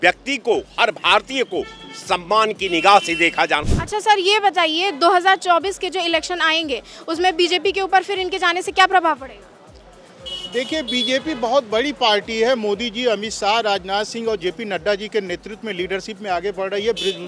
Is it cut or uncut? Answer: cut